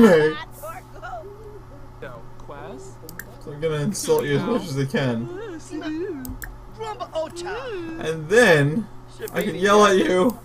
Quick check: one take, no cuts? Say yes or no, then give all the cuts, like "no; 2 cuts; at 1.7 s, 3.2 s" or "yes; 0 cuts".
no; 1 cut; at 2.1 s